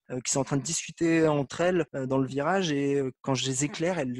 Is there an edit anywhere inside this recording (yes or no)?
no